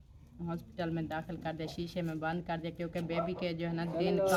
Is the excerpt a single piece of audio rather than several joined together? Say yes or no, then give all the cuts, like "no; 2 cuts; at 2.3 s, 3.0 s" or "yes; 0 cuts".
yes; 0 cuts